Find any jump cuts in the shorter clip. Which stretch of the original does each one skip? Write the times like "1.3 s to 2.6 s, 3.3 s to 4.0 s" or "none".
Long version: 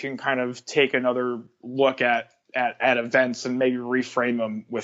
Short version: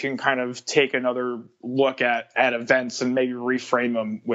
2.3 s to 2.7 s

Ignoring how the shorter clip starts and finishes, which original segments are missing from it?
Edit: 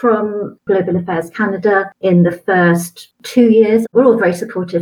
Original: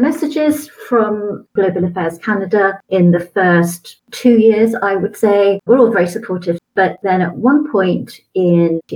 4.8 s to 5.6 s

